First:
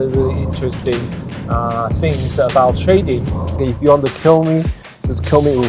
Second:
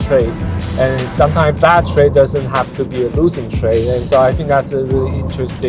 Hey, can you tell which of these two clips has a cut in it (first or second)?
first